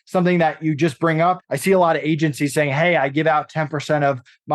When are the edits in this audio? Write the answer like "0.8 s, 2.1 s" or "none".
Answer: 1.5 s